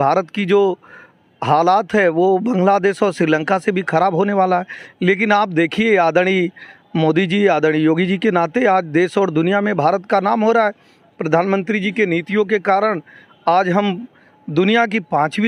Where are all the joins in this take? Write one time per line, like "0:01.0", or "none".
none

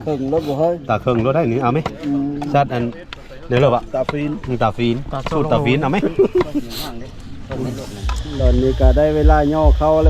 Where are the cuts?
0:08.3

